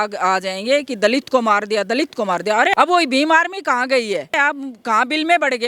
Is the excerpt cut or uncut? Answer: cut